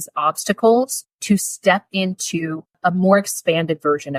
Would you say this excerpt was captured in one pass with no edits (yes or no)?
no